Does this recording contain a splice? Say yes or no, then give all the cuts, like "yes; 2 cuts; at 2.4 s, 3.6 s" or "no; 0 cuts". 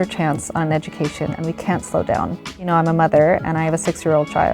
yes; 1 cut; at 2.6 s